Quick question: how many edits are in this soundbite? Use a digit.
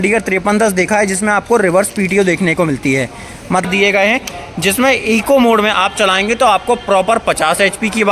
1